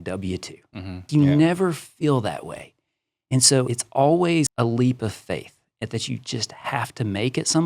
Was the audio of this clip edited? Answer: yes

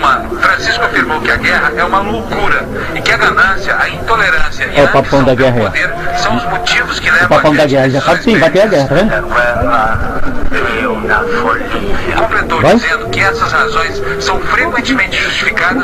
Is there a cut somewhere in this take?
no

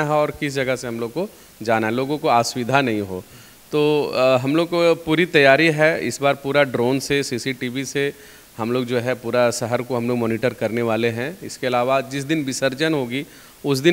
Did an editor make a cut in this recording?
no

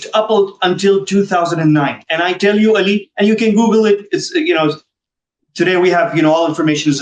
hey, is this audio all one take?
yes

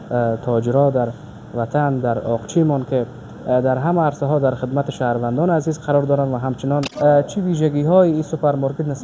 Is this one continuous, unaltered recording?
no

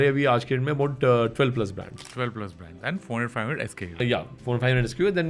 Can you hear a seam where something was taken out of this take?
yes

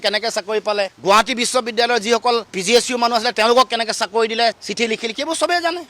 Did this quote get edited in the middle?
yes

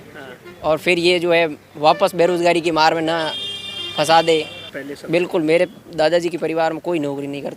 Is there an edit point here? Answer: yes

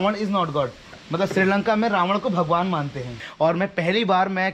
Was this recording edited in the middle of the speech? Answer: yes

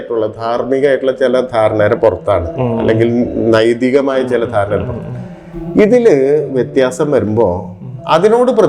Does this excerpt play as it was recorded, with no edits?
yes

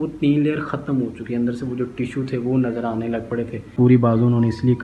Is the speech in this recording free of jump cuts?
no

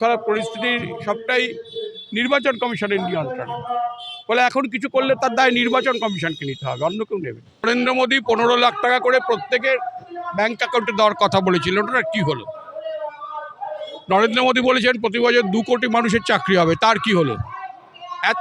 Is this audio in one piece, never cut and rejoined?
no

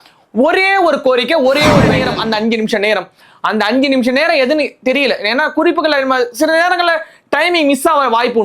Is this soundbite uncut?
no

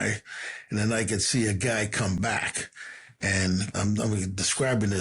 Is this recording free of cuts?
no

